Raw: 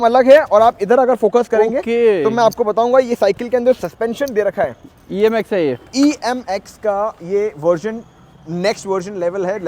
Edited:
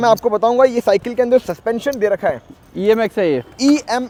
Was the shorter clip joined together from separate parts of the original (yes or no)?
no